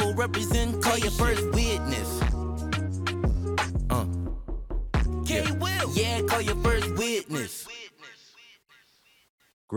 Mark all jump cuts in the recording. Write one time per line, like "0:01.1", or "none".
none

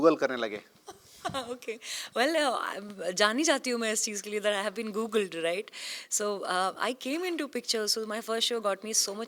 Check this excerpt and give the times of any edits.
none

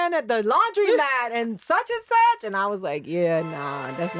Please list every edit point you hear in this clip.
none

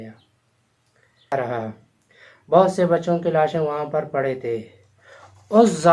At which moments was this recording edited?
0:01.3

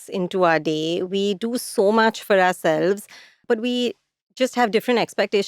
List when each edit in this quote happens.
0:03.4

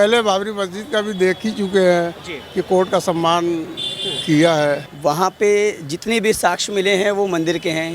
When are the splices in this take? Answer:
0:04.9

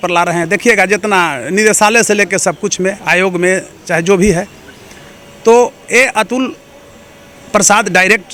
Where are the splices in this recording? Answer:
none

